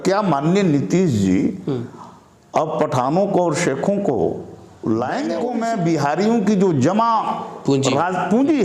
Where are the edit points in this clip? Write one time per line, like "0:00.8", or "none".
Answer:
0:05.4